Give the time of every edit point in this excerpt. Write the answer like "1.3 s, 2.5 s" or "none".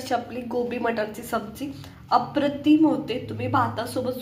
none